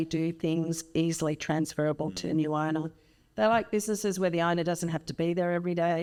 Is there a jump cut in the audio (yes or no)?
no